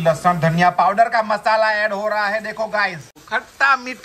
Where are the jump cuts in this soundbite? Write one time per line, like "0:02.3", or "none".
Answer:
0:03.1